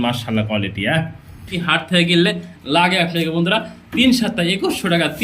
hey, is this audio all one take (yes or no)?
no